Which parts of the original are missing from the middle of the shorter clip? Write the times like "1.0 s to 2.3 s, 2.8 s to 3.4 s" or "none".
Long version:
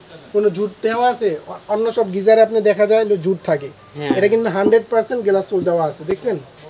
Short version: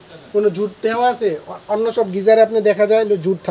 none